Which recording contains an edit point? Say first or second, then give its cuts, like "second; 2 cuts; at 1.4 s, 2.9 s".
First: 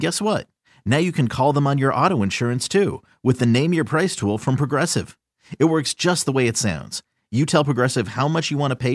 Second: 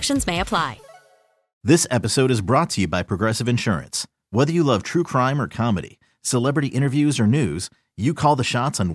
second; 1 cut; at 1.5 s